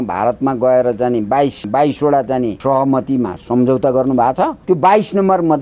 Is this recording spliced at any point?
yes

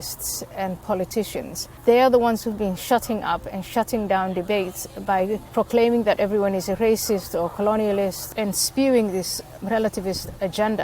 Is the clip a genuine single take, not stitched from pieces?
no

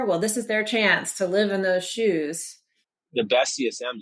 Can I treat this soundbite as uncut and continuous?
no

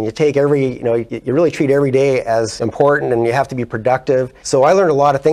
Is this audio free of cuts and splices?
no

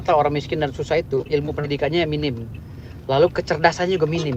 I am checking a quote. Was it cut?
no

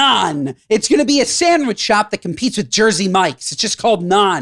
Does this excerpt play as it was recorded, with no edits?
yes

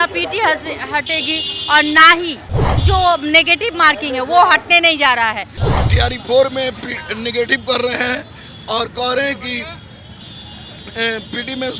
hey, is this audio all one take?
no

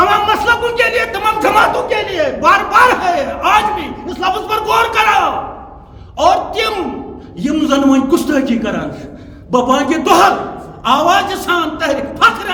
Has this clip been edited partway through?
no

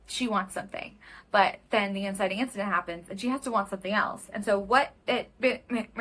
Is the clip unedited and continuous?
yes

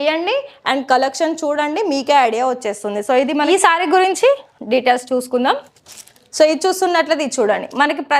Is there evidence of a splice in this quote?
yes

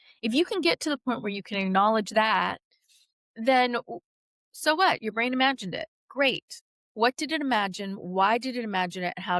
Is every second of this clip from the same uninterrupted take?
yes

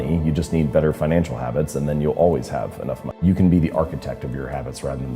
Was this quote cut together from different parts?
yes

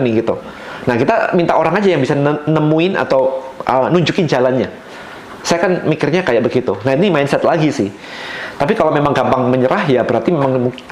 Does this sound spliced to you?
no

